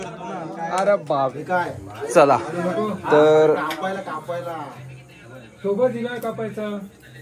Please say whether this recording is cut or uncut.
cut